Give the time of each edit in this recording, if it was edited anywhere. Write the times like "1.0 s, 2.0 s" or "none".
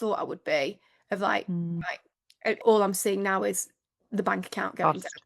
2.4 s